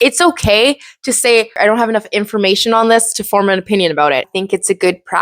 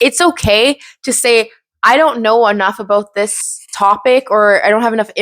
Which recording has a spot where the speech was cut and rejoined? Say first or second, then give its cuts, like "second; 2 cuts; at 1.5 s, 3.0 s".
first; 2 cuts; at 1.6 s, 4.3 s